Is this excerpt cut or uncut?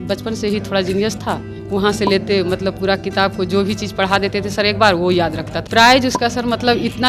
cut